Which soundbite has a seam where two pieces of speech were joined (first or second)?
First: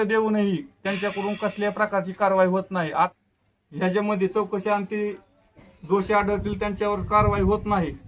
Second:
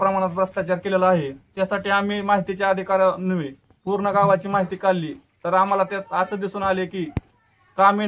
first